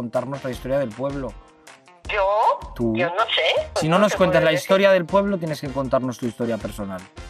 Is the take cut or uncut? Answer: cut